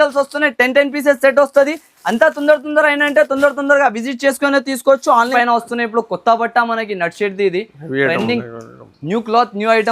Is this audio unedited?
no; 1 cut; at 5.3 s

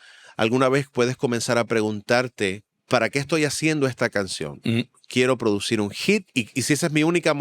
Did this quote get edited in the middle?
yes; 2 cuts; at 2.7 s, 6.3 s

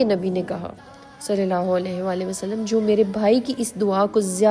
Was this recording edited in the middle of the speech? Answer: no; 0 cuts

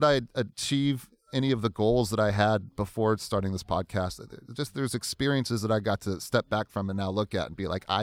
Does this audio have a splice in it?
no; 0 cuts

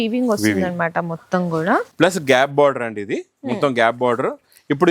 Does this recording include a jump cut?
yes; 1 cut; at 1.9 s

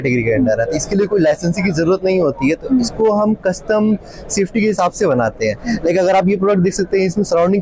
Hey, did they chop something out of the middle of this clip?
no; 0 cuts

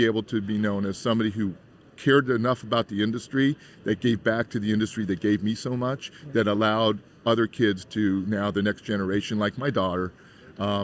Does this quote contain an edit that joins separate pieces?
no; 0 cuts

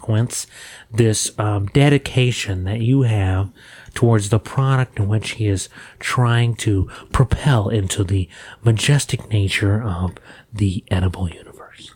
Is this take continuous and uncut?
yes; 0 cuts

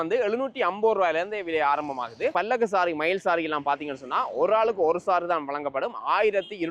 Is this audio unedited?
no; 1 cut; at 2.3 s

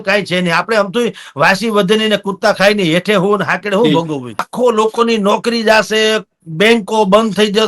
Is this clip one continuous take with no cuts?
no; 1 cut; at 4.5 s

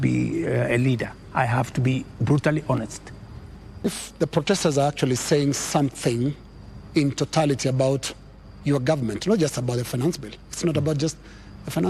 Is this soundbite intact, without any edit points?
no; 1 cut; at 3.8 s

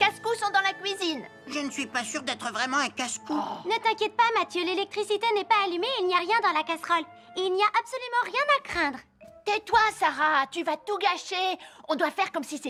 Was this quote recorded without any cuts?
yes; 0 cuts

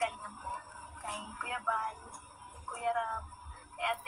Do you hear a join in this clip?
no; 0 cuts

